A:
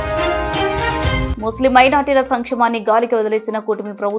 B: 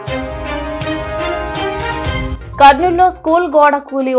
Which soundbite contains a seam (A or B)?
A